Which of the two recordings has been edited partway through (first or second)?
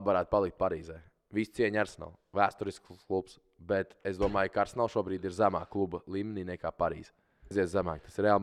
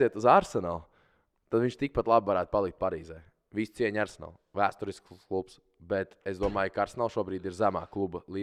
first